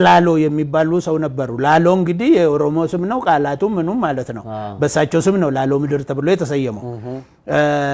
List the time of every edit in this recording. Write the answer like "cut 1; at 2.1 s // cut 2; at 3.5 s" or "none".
none